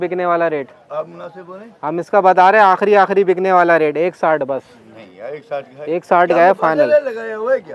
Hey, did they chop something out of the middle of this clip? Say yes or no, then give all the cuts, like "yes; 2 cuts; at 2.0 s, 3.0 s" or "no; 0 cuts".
no; 0 cuts